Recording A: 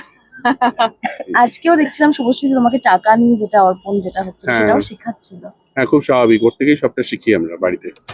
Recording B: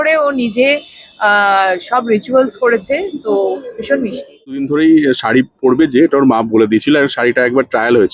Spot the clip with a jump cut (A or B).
B